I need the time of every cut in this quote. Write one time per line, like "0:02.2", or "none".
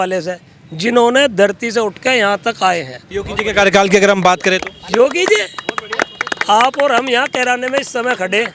0:03.0